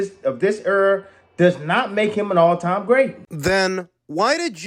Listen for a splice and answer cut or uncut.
uncut